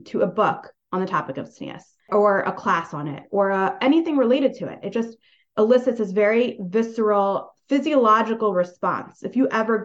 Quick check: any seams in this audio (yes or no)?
no